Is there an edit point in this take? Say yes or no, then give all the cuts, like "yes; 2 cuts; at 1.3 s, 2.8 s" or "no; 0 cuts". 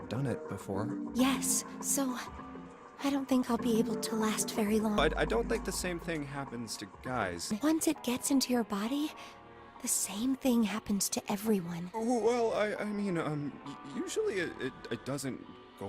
yes; 2 cuts; at 5.0 s, 7.5 s